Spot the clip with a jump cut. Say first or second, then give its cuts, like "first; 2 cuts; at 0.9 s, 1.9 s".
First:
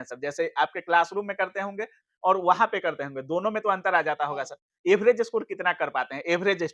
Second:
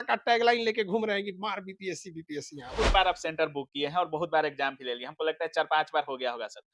second; 1 cut; at 2.7 s